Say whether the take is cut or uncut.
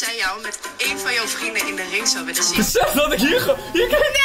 cut